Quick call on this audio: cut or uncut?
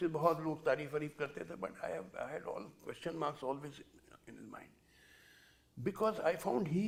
uncut